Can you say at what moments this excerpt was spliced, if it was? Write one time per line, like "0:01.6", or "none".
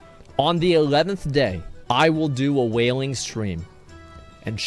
0:01.7